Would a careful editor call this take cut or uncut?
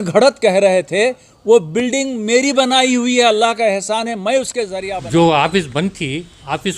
cut